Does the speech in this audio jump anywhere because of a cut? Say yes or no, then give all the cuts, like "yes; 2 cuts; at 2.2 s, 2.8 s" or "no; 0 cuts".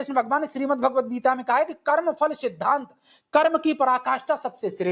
no; 0 cuts